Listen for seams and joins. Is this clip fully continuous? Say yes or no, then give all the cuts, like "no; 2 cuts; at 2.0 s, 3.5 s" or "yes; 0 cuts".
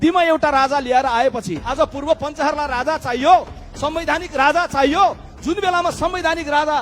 no; 1 cut; at 1.6 s